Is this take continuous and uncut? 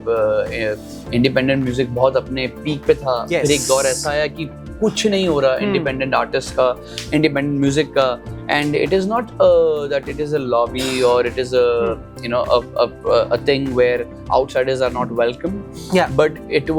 yes; 0 cuts

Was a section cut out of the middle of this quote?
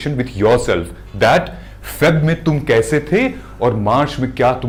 no; 0 cuts

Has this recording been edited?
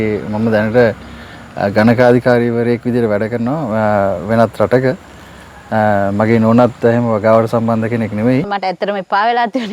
yes; 1 cut; at 8.5 s

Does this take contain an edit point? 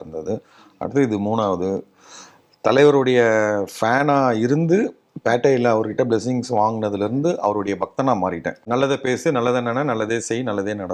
yes; 1 cut; at 8.6 s

